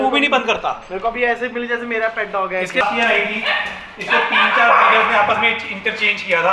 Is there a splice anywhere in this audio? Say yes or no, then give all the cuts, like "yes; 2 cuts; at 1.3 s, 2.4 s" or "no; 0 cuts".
yes; 1 cut; at 2.8 s